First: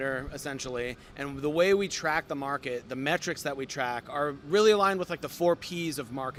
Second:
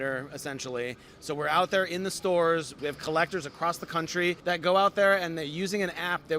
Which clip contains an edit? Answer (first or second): second